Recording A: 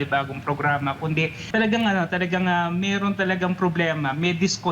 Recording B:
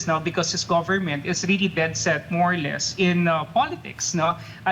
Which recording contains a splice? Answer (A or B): A